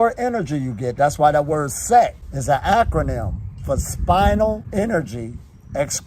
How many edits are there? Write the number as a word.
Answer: two